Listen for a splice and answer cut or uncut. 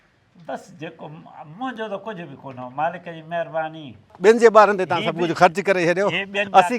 cut